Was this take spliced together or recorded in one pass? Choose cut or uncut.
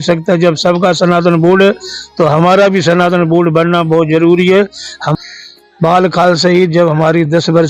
cut